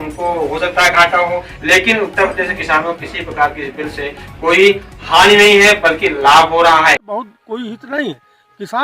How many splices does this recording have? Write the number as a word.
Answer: one